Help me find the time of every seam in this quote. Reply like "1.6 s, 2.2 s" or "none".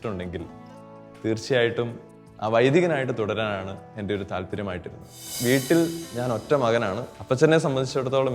5.4 s, 7.1 s